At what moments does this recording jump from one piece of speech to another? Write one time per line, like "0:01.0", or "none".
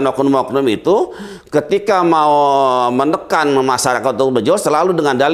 none